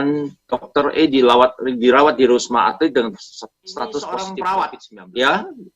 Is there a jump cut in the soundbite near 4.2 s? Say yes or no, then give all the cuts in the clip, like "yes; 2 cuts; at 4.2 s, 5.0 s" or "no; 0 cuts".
yes; 1 cut; at 4.2 s